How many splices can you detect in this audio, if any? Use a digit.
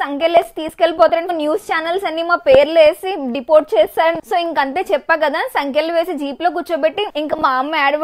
3